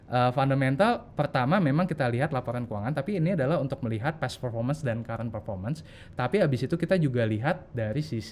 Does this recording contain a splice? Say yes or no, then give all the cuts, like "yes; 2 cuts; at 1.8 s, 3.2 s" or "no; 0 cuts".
no; 0 cuts